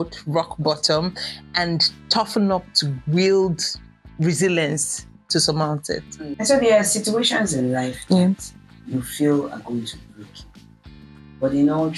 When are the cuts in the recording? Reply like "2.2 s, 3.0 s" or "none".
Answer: 6.4 s

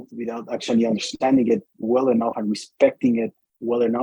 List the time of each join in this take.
none

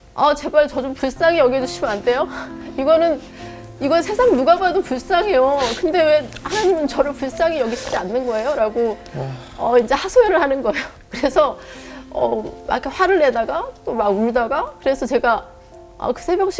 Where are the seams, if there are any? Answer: none

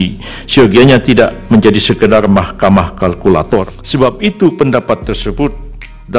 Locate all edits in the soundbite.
3.8 s

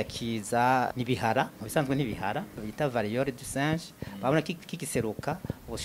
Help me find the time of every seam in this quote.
0.9 s, 2.6 s

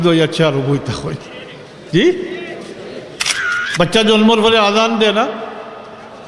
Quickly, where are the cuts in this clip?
3.2 s

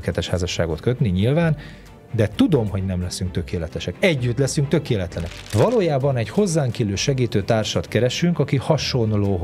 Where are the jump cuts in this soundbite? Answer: 5.2 s

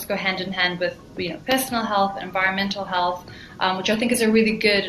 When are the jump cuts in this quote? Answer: none

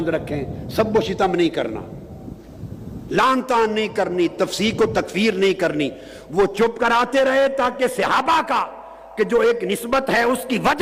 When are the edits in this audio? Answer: none

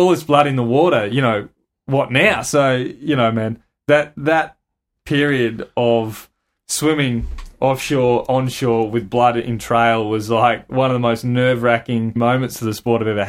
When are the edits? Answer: 12.2 s

